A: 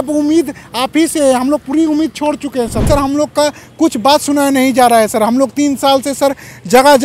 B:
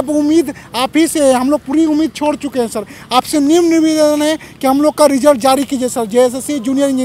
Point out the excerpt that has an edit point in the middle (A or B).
A